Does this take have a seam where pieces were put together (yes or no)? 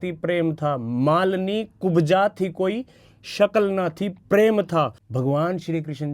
yes